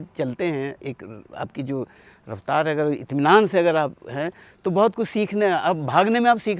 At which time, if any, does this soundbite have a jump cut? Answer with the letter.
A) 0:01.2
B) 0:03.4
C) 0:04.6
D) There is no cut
D